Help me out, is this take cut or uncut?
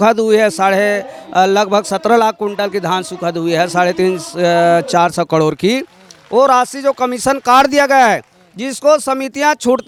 uncut